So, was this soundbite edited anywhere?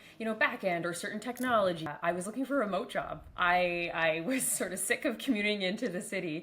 yes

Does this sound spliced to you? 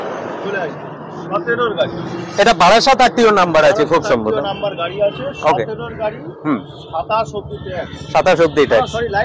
yes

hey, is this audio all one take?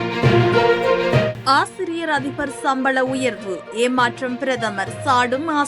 no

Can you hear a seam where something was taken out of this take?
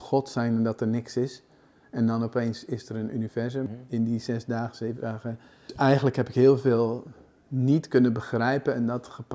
yes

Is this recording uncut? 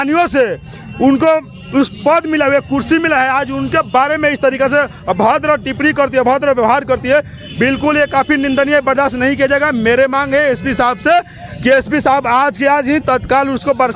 yes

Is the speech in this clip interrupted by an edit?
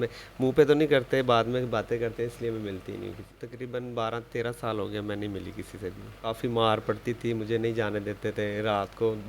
yes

